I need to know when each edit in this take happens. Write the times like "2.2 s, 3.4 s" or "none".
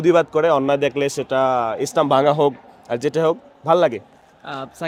none